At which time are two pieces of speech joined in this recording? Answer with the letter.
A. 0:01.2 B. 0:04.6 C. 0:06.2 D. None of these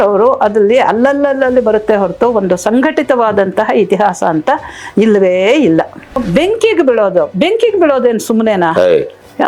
C